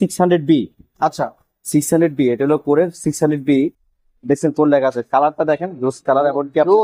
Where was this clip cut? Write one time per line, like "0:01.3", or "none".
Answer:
none